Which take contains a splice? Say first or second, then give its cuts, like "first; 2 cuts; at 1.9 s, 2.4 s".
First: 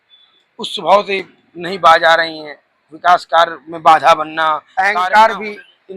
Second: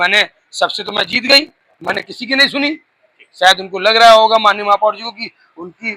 first; 1 cut; at 4.7 s